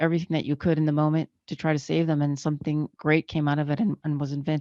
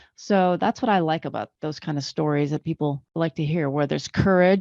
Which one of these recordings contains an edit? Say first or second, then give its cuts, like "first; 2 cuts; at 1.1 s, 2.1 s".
second; 2 cuts; at 1.5 s, 3.0 s